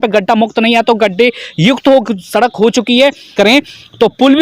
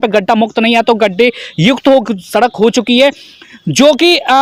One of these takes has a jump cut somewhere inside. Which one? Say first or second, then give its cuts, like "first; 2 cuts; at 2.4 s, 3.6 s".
first; 1 cut; at 3.3 s